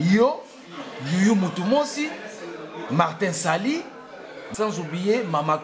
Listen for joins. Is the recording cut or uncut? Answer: cut